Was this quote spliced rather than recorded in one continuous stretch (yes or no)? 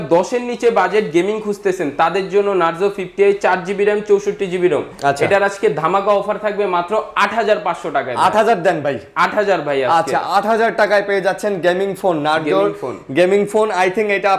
no